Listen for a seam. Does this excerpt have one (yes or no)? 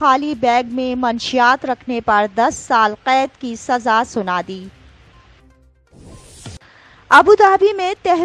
yes